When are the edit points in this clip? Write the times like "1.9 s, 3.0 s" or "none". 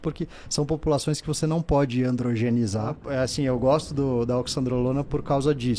3.0 s